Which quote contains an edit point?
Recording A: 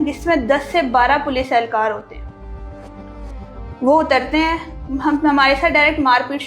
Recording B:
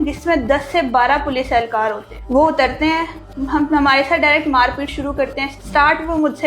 B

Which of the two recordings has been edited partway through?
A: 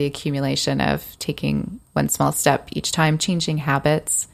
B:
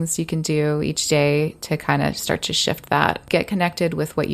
B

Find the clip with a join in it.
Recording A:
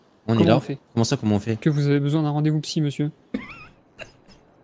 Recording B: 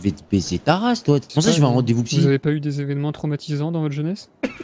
B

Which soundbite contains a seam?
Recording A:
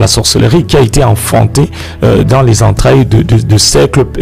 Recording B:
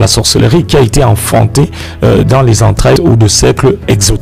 B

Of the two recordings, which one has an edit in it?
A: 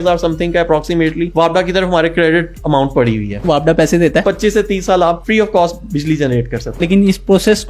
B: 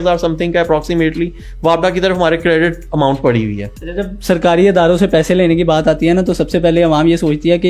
A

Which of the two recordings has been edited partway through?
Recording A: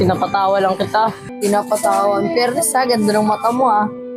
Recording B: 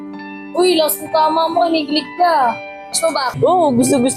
A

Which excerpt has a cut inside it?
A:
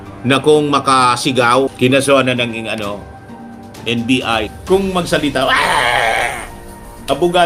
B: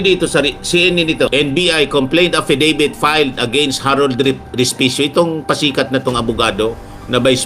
B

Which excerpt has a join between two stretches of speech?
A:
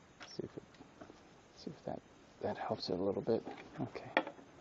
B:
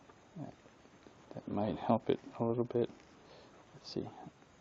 B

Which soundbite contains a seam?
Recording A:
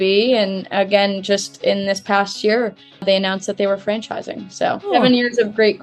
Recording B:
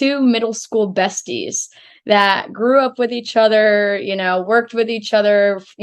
A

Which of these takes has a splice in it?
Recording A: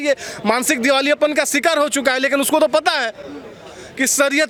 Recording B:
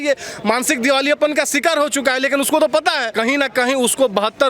B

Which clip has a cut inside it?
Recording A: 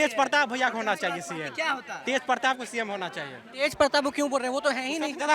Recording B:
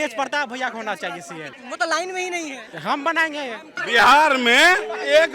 B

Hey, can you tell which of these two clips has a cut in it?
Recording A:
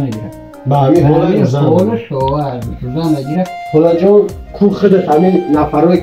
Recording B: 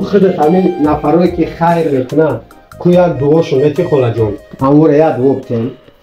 A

